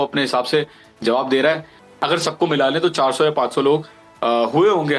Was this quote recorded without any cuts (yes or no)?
no